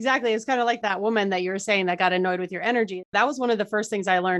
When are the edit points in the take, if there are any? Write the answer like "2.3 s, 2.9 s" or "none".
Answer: 0.8 s, 3.0 s